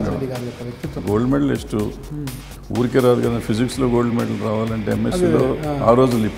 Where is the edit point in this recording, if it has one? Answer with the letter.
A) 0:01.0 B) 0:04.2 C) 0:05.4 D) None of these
A